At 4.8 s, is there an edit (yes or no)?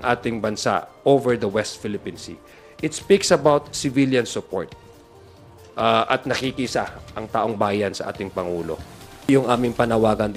no